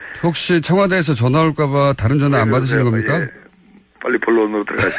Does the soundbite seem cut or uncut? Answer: uncut